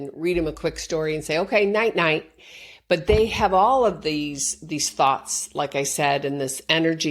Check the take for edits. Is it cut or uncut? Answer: cut